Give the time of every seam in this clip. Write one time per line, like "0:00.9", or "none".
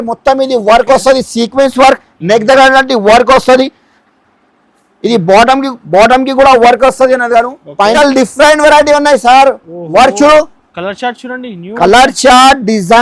0:07.9